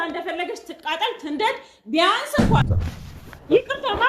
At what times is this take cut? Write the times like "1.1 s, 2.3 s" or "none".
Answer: 2.8 s